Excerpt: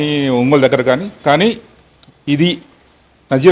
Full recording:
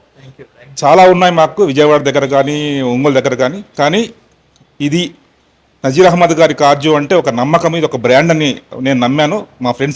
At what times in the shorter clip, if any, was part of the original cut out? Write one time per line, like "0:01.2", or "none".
none